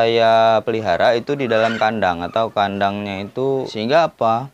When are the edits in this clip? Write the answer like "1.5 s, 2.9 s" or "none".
3.5 s